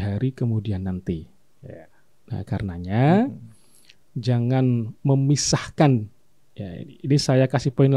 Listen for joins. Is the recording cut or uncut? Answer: uncut